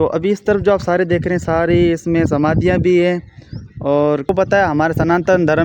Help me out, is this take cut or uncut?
cut